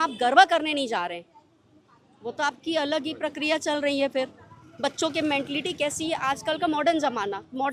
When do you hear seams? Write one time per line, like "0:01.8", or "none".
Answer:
none